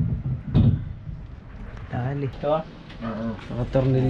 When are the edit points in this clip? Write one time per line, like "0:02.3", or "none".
0:02.3